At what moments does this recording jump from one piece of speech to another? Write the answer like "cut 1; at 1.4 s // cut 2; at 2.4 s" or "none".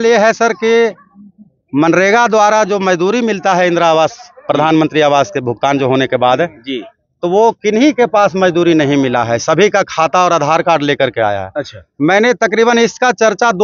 none